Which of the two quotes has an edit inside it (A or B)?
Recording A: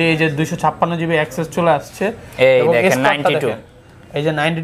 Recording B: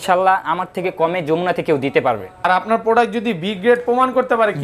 B